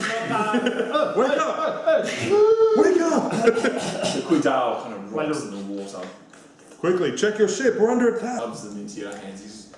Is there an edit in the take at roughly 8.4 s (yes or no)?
yes